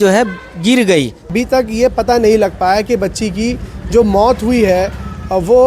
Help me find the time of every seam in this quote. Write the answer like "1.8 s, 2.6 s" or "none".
1.2 s

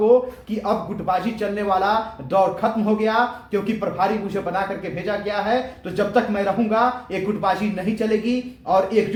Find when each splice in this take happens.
none

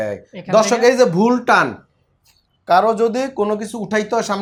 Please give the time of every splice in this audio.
none

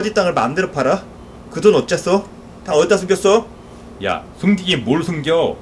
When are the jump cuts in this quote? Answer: none

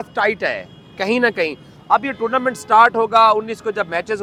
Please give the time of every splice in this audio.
none

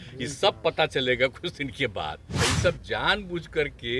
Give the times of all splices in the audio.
2.2 s

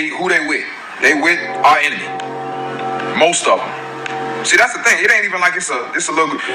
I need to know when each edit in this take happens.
none

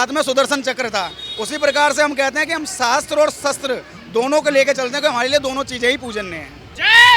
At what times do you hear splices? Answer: none

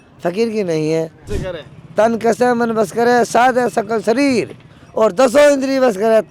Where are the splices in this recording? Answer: 1.2 s

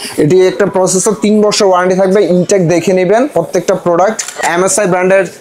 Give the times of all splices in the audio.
4.5 s

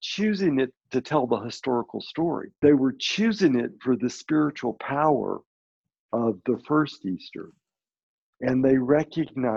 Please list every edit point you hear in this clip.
2.5 s

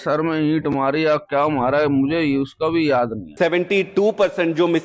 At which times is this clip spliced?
3.2 s

